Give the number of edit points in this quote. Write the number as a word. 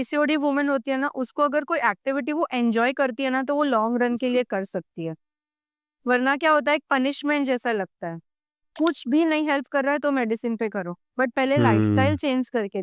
one